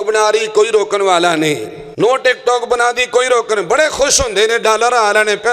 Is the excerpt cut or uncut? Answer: cut